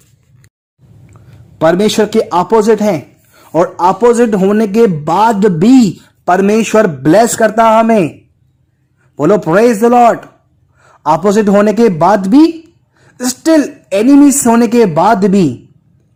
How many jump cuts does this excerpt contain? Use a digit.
0